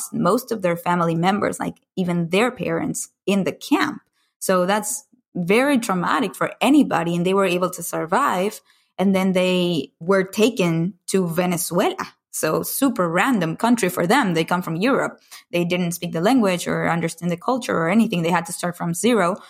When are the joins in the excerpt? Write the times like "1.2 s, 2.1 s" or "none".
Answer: 9.9 s, 17.4 s